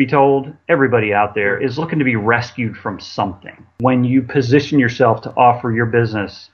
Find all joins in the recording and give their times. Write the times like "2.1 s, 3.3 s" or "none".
1.5 s, 3.7 s